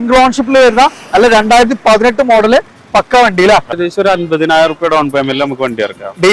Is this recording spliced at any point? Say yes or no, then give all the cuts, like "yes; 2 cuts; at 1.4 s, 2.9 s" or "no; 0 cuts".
yes; 1 cut; at 3.8 s